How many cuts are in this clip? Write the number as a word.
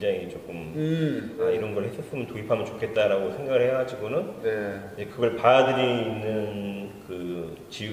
one